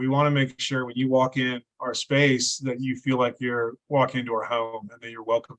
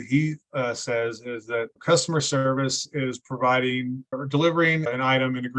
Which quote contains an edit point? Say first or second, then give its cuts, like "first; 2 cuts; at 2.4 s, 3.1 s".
second; 3 cuts; at 1.8 s, 4.2 s, 4.9 s